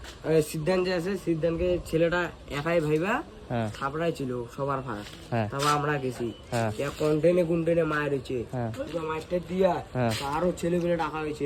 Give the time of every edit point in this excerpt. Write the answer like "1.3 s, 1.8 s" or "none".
none